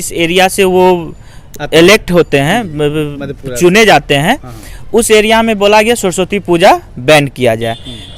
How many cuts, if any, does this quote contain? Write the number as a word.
zero